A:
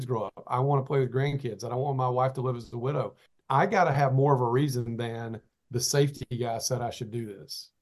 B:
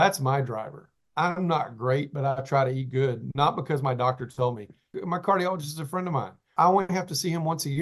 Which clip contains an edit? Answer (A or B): B